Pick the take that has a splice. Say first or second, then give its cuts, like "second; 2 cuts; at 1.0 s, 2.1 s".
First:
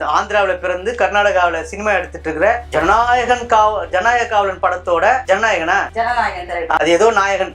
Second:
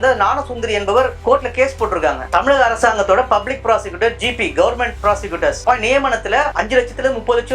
second; 3 cuts; at 1.2 s, 2.3 s, 5.6 s